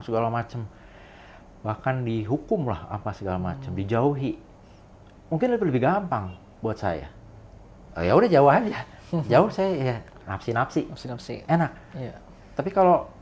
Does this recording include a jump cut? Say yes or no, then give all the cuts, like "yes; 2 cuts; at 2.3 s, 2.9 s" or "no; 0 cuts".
no; 0 cuts